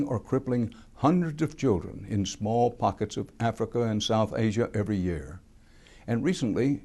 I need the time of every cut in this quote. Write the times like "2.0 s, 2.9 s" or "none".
4.7 s

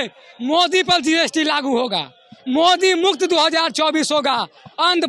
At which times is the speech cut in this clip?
none

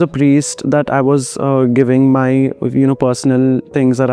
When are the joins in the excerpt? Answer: none

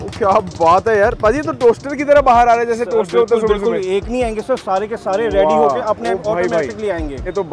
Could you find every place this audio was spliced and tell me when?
none

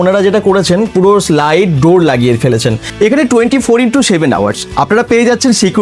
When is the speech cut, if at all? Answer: 2.9 s

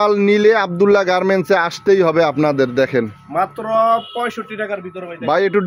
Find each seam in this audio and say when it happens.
none

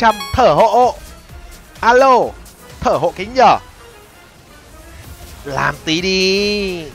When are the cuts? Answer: none

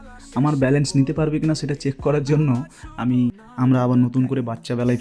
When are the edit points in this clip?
3.3 s

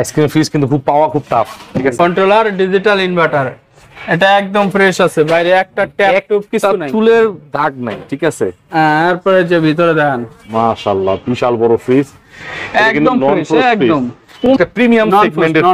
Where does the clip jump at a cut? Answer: 2.0 s, 14.5 s

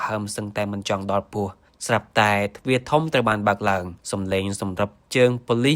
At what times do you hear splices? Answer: 4.0 s

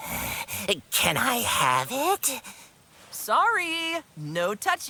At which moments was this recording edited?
none

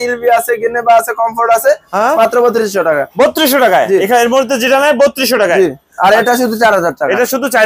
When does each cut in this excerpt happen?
none

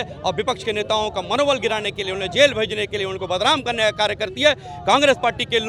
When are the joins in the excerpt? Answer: none

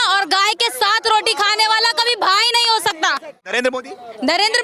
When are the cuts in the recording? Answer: 3.5 s

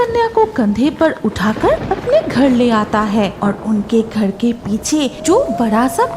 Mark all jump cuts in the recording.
1.9 s, 3.3 s, 5.2 s

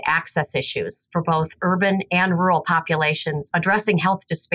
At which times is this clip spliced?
1.0 s, 3.4 s

